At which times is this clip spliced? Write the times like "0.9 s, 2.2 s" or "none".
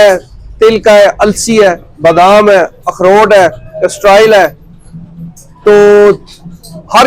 none